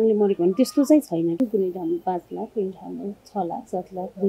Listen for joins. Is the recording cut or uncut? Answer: cut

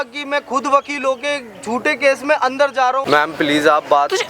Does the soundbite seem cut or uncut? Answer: cut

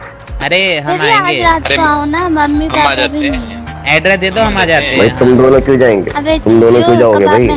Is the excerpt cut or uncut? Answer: uncut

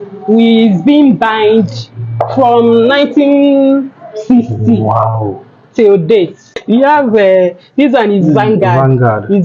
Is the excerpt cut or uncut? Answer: cut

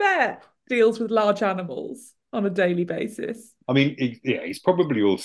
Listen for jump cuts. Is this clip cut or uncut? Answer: uncut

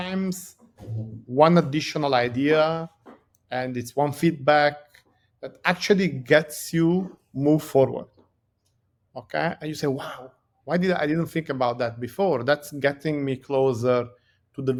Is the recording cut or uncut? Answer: uncut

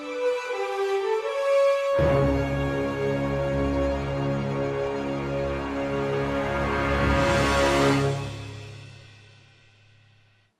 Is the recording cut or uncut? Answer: cut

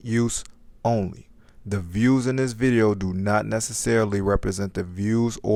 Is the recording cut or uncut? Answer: uncut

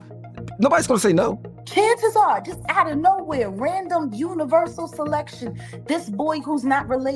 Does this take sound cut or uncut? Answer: cut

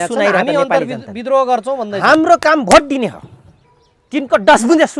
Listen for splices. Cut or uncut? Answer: uncut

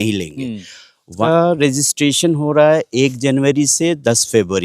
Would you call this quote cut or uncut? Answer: cut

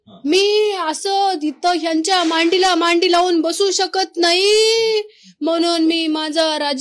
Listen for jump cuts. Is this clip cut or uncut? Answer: uncut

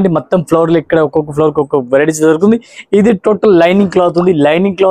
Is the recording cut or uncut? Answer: uncut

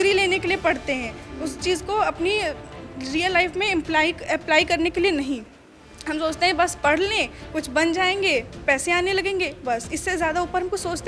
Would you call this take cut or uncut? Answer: uncut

